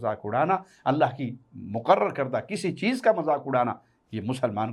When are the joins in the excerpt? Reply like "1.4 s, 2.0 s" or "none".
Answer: none